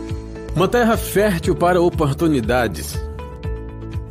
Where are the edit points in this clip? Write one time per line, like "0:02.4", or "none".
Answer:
0:01.7